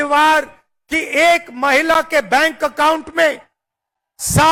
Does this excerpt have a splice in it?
no; 0 cuts

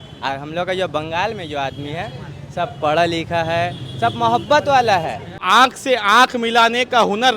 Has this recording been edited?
yes; 1 cut; at 5.3 s

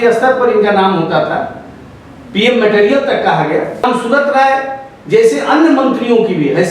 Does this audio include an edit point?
yes; 1 cut; at 3.8 s

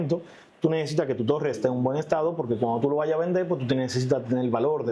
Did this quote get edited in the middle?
no; 0 cuts

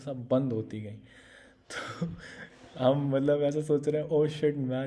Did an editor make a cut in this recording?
no; 0 cuts

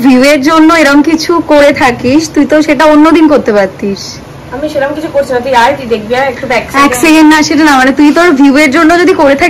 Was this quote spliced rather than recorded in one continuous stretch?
no; 0 cuts

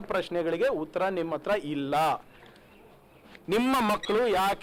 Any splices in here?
no; 0 cuts

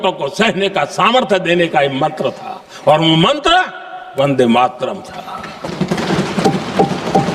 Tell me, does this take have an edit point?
no; 0 cuts

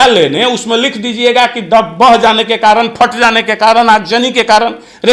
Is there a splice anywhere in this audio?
no; 0 cuts

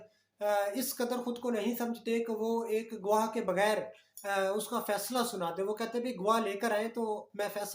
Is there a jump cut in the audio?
no; 0 cuts

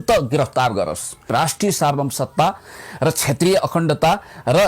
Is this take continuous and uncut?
no; 1 cut; at 1.3 s

